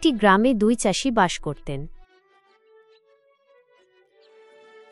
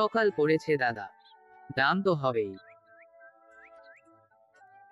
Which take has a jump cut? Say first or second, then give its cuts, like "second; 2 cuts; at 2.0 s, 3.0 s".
first; 1 cut; at 1.9 s